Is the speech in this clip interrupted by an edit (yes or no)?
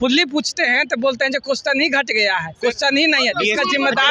no